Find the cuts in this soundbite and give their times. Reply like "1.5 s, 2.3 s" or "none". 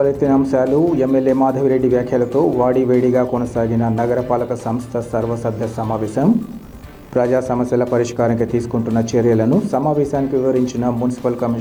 none